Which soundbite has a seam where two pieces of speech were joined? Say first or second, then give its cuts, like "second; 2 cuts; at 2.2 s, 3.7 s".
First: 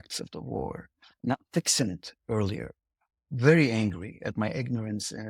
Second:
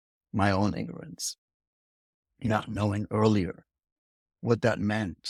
first; 1 cut; at 1.2 s